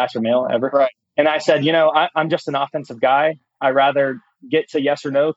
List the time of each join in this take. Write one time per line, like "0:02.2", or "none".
0:01.0